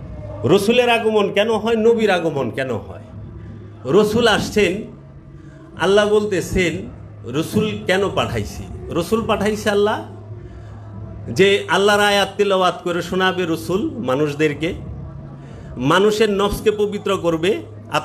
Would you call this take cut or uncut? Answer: uncut